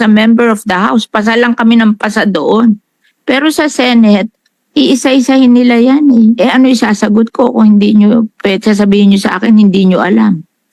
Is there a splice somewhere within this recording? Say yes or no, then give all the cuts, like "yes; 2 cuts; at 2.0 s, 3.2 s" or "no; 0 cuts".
no; 0 cuts